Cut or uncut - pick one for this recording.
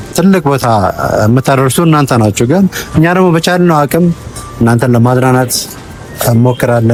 uncut